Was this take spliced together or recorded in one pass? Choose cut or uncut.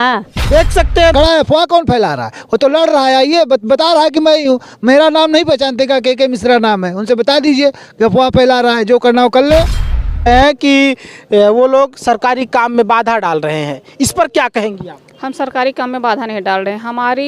cut